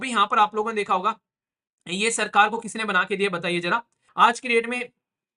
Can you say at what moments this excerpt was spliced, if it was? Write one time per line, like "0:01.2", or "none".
0:04.0

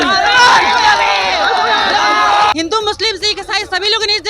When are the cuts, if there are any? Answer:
0:02.5

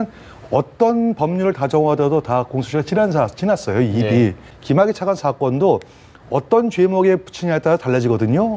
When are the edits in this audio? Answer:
0:04.5

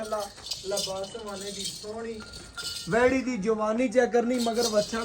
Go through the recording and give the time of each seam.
0:02.7

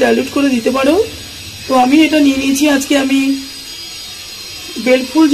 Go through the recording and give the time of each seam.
none

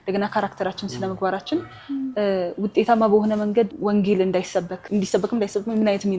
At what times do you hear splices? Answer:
0:03.7
0:04.8

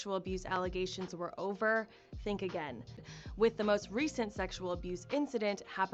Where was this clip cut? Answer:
0:03.0

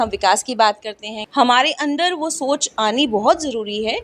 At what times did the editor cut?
0:01.2

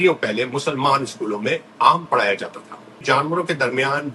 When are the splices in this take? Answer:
0:03.0

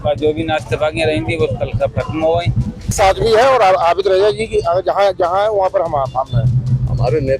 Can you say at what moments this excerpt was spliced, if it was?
0:02.9

